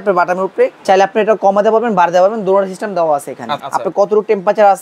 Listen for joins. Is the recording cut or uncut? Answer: cut